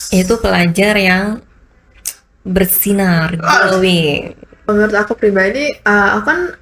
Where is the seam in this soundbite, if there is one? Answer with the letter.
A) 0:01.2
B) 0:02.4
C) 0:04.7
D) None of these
C